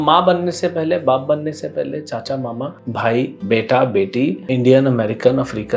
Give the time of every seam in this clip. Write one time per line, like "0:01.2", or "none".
0:03.2
0:04.4